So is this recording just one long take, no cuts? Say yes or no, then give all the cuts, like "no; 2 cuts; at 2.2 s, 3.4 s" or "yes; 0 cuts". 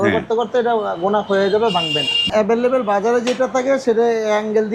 no; 1 cut; at 2.3 s